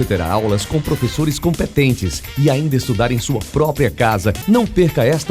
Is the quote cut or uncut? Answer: uncut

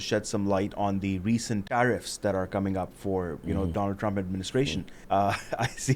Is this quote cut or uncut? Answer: cut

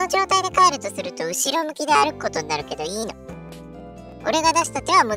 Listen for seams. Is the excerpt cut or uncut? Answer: uncut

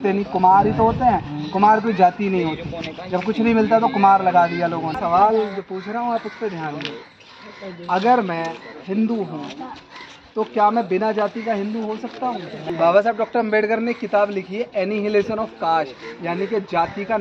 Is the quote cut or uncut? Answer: cut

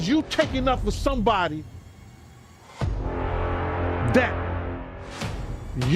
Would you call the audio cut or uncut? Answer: uncut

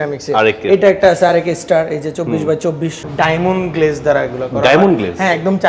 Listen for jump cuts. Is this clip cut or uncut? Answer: cut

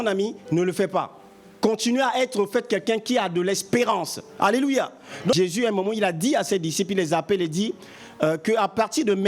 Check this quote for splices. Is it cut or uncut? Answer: cut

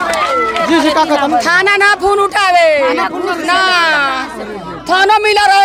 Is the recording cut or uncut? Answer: uncut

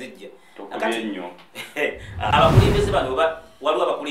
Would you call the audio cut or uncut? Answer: cut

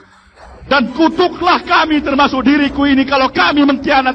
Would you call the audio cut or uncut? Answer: uncut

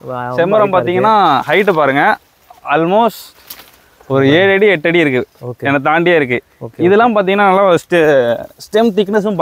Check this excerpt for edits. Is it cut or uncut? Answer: uncut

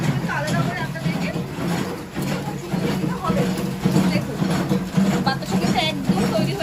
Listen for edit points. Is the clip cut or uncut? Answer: uncut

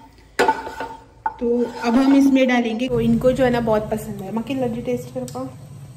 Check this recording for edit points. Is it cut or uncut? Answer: cut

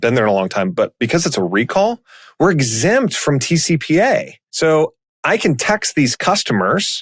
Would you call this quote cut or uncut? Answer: cut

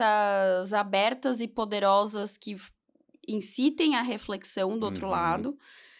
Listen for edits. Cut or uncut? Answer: uncut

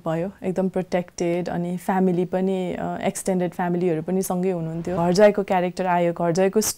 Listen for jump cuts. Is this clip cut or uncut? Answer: cut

